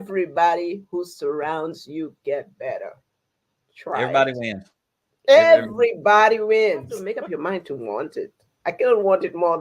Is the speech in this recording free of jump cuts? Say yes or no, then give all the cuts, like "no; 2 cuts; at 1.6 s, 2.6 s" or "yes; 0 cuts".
no; 1 cut; at 7.0 s